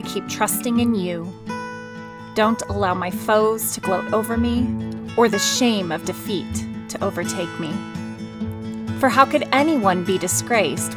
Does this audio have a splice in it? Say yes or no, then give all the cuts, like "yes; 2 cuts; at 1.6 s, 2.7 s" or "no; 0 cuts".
no; 0 cuts